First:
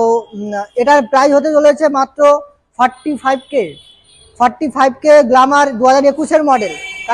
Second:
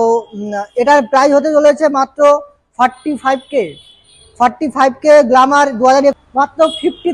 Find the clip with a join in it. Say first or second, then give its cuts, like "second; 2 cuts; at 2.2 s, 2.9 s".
second; 1 cut; at 6.2 s